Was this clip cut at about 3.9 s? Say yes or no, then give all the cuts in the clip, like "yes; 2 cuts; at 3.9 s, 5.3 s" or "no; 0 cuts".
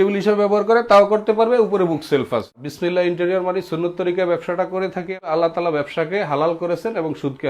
no; 2 cuts; at 2.7 s, 5.3 s